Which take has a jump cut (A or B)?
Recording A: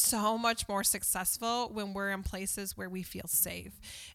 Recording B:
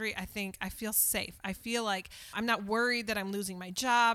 B